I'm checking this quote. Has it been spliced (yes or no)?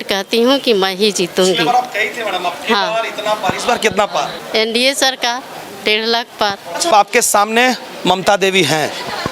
yes